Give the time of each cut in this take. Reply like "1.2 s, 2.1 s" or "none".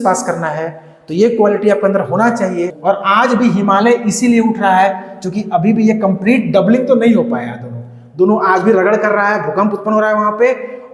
2.7 s